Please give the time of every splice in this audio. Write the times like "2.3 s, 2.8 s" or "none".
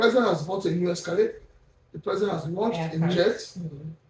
3.1 s